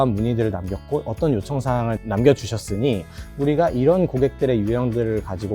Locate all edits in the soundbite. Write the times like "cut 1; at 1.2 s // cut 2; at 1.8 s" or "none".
cut 1; at 2.0 s